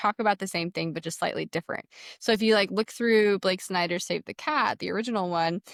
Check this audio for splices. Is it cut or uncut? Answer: uncut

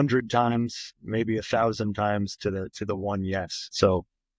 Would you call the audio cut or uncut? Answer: uncut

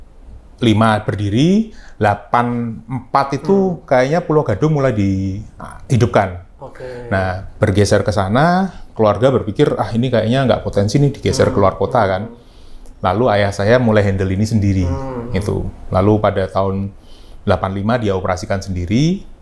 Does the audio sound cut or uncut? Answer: uncut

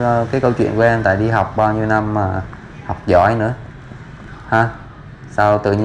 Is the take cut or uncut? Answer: uncut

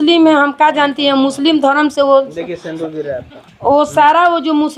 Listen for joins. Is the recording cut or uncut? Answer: uncut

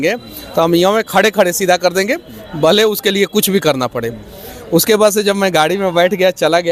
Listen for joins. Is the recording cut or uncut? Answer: uncut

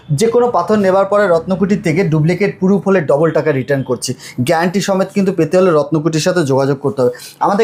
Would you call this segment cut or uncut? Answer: uncut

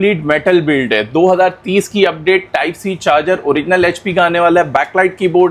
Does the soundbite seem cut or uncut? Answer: uncut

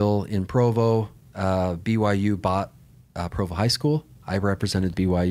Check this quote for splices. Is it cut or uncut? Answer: uncut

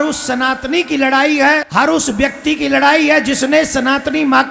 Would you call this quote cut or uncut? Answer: cut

